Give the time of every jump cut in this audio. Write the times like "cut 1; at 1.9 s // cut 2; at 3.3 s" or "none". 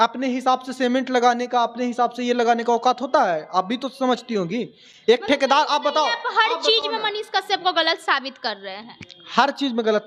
none